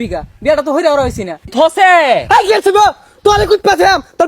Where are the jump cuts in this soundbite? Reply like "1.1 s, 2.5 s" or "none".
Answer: 1.5 s